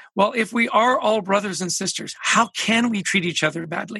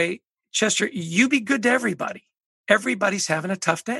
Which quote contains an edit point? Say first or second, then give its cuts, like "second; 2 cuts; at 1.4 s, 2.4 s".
first; 1 cut; at 3.1 s